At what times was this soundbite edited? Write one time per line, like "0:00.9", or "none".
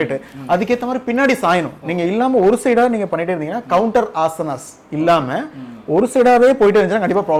none